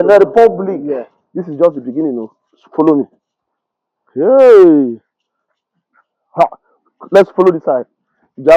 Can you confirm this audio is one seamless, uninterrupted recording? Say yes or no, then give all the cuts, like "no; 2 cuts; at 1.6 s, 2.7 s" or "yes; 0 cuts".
no; 1 cut; at 1.2 s